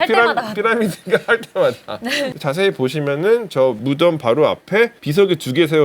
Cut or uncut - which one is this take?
cut